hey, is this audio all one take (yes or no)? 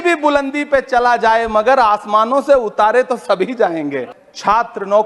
no